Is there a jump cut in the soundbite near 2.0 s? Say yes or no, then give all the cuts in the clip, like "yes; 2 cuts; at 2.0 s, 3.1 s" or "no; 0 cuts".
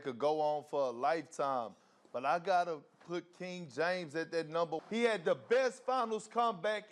no; 1 cut; at 4.8 s